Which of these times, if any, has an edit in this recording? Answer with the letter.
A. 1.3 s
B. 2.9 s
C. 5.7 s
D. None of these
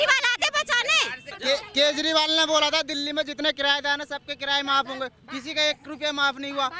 A